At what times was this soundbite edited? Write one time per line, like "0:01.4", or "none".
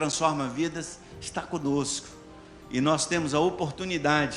none